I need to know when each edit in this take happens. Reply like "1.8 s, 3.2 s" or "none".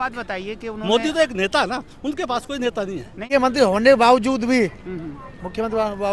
3.2 s